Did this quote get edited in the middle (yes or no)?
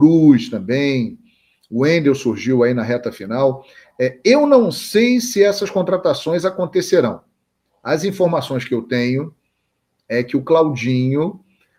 no